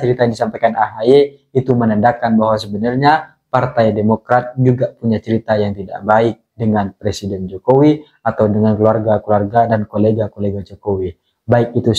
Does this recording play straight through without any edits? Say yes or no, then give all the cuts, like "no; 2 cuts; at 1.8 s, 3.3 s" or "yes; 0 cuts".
yes; 0 cuts